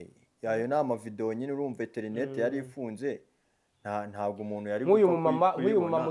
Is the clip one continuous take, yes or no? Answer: yes